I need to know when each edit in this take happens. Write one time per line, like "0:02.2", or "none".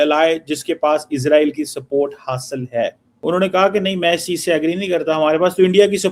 0:03.1

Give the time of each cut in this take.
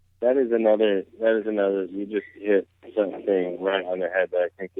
none

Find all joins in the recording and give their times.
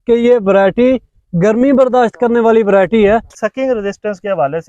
0:03.3

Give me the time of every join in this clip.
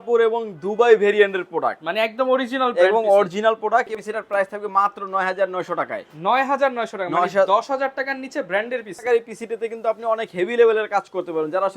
0:03.9
0:09.0

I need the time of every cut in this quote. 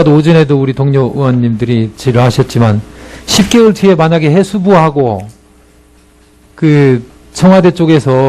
0:01.1

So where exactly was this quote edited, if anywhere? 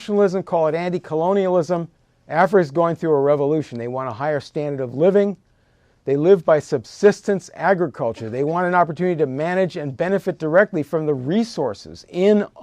none

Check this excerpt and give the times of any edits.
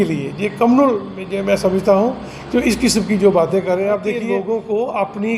0:04.3

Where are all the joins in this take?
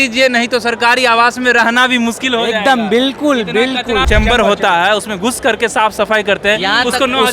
0:04.0

